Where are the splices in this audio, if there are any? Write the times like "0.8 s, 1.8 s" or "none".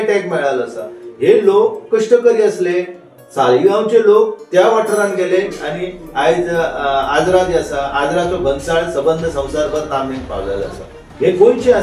none

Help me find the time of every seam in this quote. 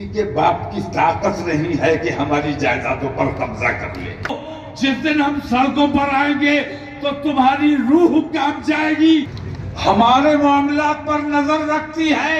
4.4 s, 9.4 s

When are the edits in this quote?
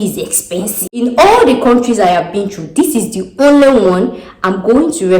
1.0 s

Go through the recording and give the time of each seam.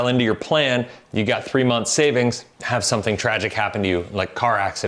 2.5 s

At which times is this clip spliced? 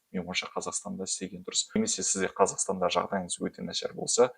1.8 s

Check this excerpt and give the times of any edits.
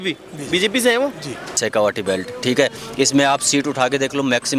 1.6 s

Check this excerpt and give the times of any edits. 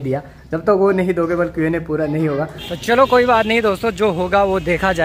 2.9 s

